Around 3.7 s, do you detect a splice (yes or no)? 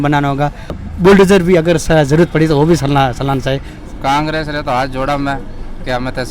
yes